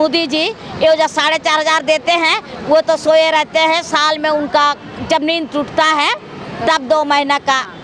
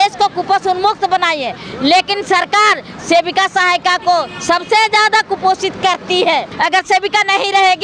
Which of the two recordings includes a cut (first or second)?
second